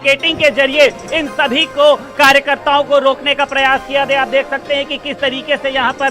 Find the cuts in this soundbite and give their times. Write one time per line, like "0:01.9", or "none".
none